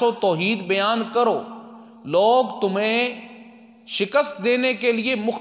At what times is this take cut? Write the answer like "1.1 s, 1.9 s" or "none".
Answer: none